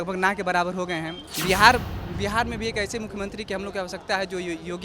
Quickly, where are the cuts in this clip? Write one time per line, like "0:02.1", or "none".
0:01.2